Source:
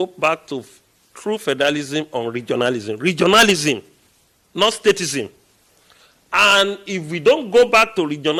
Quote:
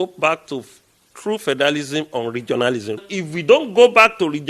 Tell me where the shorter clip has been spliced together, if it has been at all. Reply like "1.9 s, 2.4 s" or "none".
3.0 s